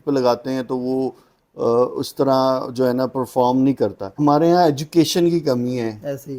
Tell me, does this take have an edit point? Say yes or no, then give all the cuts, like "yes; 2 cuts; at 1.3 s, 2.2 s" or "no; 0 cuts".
yes; 1 cut; at 4.2 s